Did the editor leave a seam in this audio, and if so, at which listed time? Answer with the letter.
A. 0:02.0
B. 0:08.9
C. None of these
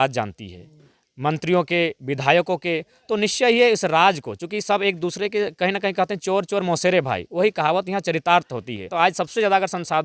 B